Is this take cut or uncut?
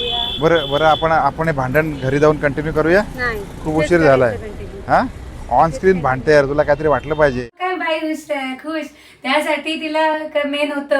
cut